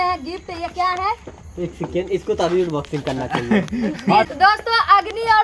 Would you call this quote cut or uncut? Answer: cut